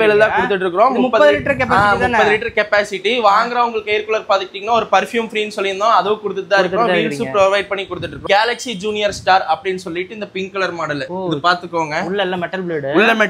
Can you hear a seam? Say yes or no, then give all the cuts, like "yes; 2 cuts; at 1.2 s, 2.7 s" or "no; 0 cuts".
no; 0 cuts